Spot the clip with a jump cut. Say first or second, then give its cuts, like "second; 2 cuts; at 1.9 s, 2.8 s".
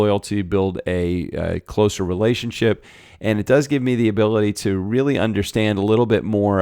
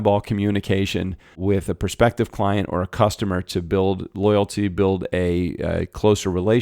second; 1 cut; at 1.3 s